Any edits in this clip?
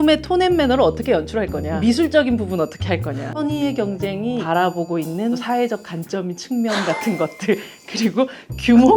yes; 4 cuts; at 1.7 s, 3.3 s, 4.4 s, 5.4 s

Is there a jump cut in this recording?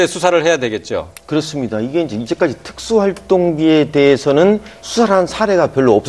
yes; 1 cut; at 2.2 s

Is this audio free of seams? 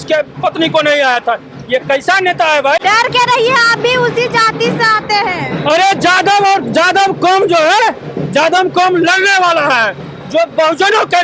yes; 0 cuts

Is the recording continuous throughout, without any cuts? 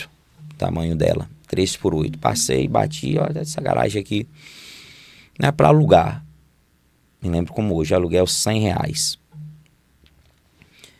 yes; 0 cuts

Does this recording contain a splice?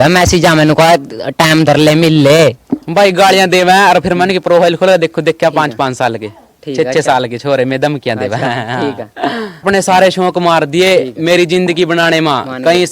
yes; 1 cut; at 9.6 s

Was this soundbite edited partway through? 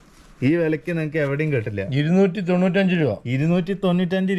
no; 0 cuts

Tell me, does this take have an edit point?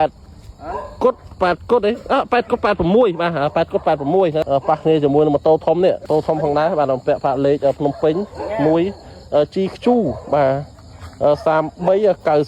yes; 2 cuts; at 4.4 s, 6.0 s

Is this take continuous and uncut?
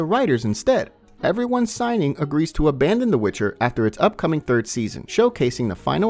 no; 2 cuts; at 1.1 s, 5.0 s

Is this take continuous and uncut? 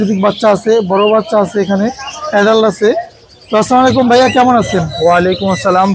yes; 0 cuts

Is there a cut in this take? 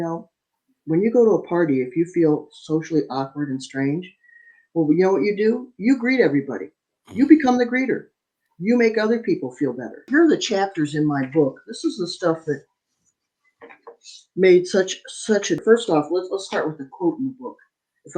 yes; 2 cuts; at 10.0 s, 15.6 s

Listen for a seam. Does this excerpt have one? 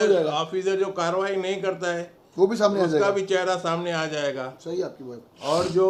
no; 0 cuts

